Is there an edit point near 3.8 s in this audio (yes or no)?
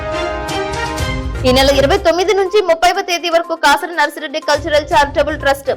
no